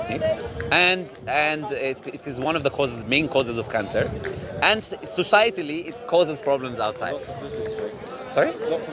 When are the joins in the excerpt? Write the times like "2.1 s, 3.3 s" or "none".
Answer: none